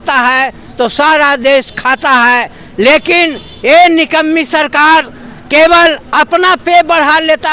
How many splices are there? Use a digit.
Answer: 0